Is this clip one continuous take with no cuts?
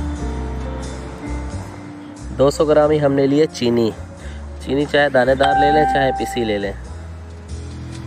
no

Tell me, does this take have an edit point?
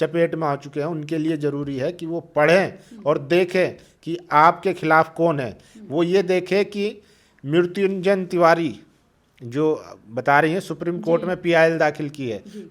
no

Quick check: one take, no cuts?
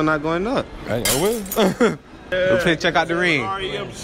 no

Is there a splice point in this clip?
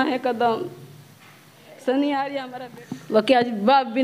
yes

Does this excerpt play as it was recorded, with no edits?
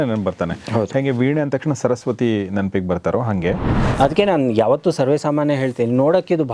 no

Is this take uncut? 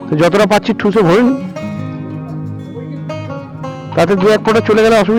no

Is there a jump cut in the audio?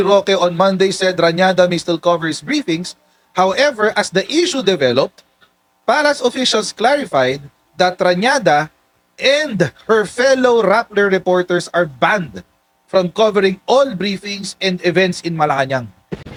no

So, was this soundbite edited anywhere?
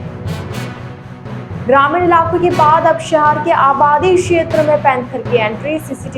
yes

